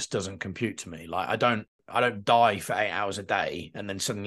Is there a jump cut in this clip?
yes; 1 cut; at 1.8 s

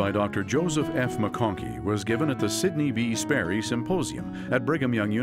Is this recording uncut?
yes; 0 cuts

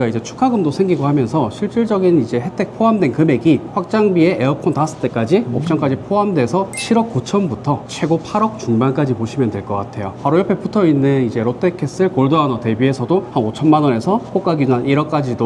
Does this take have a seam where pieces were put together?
no; 0 cuts

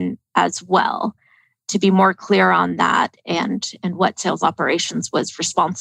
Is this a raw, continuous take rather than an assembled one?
yes; 0 cuts

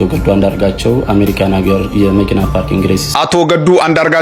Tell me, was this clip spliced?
yes; 1 cut; at 3.1 s

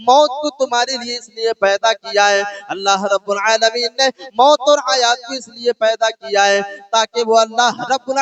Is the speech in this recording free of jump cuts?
yes; 0 cuts

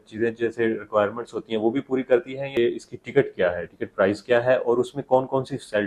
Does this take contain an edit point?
yes; 1 cut; at 2.6 s

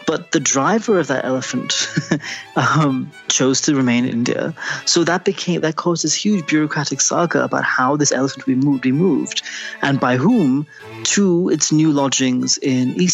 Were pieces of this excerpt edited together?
no; 0 cuts

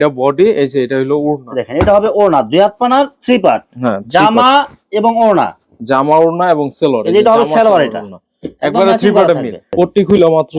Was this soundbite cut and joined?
yes; 1 cut; at 9.6 s

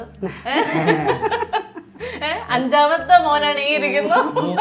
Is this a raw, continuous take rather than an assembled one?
yes; 0 cuts

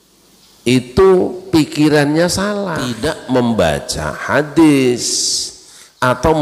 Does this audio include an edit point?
yes; 1 cut; at 2.9 s

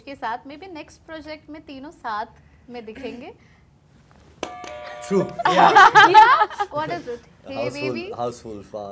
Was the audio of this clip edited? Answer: no; 0 cuts

